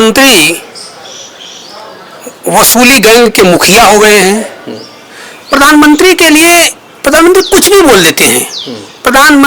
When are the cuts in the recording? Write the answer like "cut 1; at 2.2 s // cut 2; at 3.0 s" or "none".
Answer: none